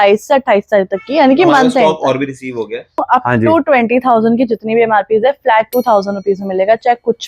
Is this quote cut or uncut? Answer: cut